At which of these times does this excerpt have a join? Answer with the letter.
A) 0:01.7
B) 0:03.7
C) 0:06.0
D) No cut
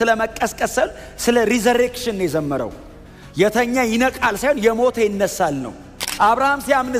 C